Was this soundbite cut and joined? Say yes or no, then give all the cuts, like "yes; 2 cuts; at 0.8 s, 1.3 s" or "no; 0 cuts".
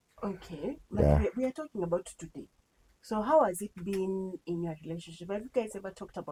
no; 0 cuts